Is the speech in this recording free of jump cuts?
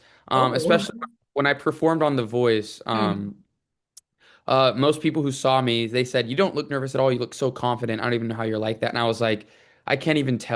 yes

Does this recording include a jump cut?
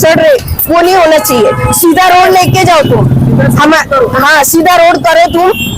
no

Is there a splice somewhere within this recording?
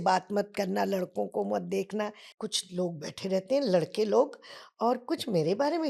yes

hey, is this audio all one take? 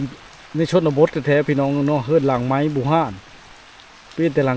yes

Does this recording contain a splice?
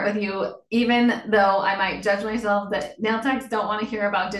no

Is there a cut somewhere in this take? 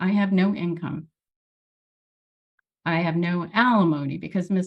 no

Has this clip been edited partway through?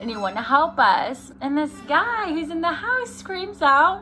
yes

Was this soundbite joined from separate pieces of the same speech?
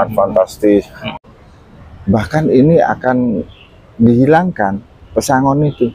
yes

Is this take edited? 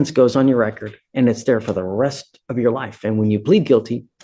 no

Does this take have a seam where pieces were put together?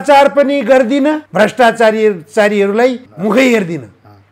yes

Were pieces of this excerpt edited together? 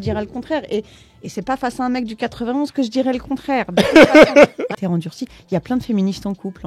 yes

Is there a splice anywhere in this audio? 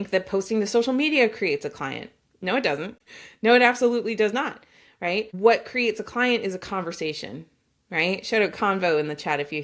no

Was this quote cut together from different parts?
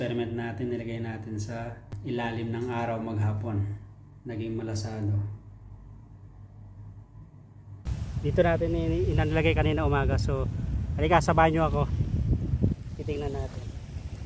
yes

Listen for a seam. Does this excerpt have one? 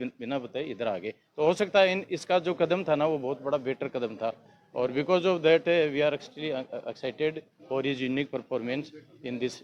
no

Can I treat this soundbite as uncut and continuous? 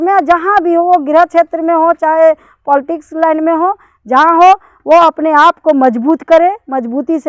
yes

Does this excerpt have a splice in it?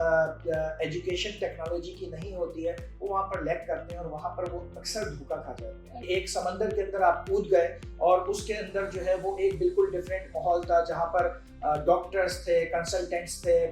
yes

